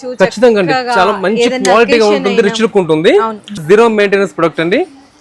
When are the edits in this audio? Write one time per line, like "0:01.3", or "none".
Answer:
0:03.6